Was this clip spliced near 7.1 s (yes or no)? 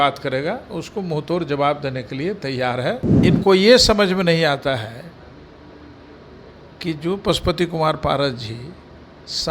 no